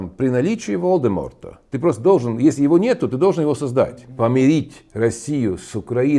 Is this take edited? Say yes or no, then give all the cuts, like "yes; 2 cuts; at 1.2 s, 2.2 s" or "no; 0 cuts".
yes; 1 cut; at 4.1 s